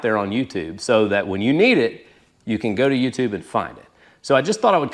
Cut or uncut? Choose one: uncut